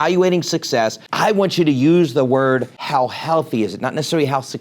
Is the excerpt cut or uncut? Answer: cut